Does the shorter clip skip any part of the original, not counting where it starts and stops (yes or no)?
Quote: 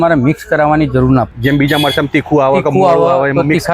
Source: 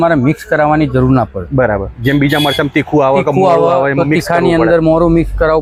yes